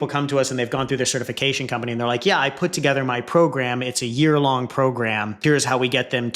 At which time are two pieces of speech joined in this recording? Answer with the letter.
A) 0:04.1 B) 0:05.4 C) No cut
B